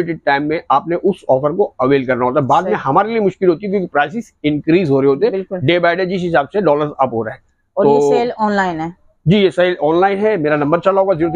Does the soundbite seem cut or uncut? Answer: uncut